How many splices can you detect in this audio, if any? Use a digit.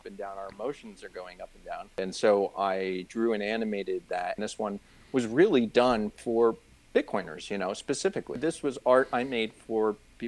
3